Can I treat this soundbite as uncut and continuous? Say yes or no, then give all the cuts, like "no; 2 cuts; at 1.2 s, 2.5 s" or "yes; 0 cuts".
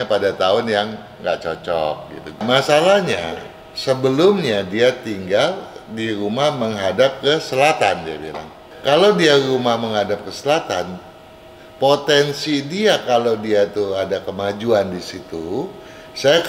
no; 2 cuts; at 2.4 s, 8.7 s